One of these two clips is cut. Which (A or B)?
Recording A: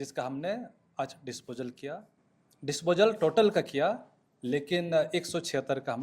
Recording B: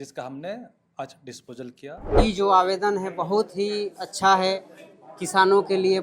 B